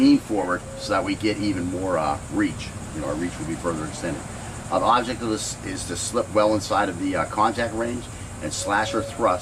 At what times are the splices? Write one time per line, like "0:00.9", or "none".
0:05.2